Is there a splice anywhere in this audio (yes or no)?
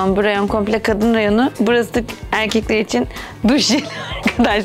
yes